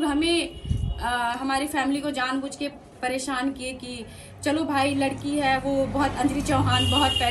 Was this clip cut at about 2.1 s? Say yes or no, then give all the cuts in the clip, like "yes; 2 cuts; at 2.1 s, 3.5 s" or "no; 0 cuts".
no; 0 cuts